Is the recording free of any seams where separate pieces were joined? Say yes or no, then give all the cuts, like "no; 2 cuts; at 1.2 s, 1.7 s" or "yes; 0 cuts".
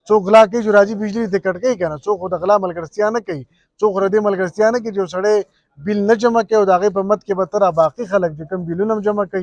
yes; 0 cuts